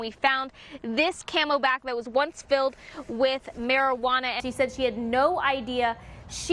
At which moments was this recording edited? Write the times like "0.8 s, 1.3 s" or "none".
4.4 s